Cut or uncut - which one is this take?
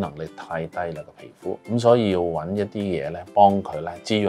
cut